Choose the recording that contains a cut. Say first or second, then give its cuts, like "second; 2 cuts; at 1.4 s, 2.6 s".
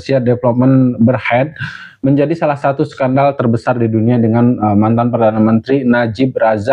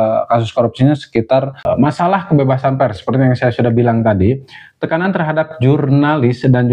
second; 1 cut; at 1.5 s